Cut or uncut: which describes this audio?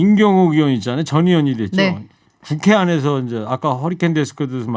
uncut